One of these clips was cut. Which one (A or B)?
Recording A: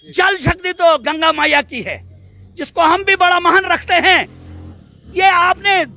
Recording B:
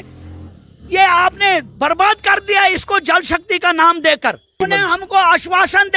B